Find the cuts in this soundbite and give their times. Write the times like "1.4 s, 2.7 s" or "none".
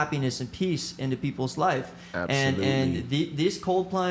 none